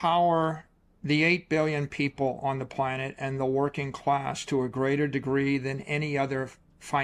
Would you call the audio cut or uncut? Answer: uncut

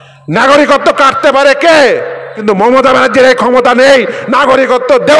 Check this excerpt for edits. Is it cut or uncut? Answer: cut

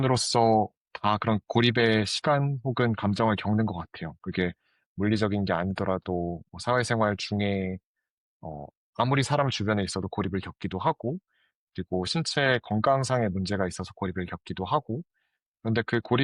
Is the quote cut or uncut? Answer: uncut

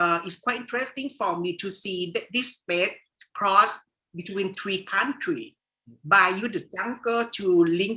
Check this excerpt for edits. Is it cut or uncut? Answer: uncut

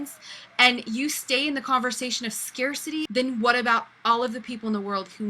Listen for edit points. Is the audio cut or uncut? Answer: cut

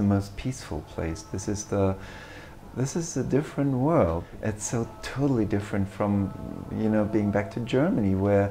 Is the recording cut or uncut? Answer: cut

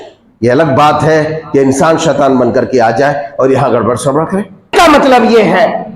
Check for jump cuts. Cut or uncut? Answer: cut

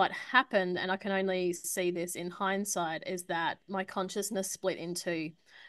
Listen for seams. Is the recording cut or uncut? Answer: uncut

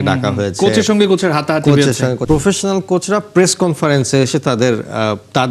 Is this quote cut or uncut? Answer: cut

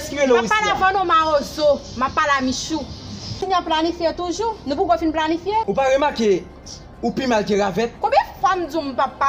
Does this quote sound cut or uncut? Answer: cut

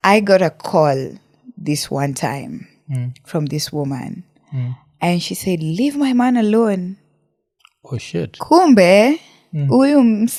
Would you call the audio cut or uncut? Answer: uncut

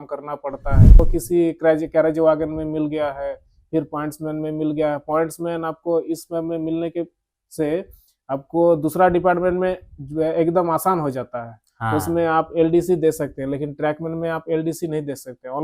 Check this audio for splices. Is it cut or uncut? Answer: cut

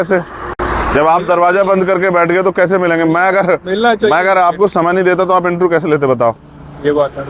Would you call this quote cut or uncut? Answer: uncut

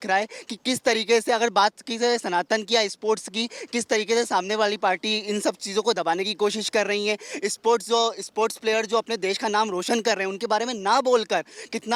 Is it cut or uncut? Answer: uncut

